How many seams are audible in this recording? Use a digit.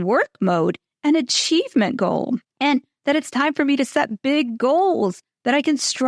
0